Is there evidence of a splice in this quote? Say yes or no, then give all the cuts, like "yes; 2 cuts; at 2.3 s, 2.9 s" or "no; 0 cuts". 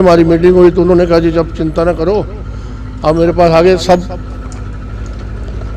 no; 0 cuts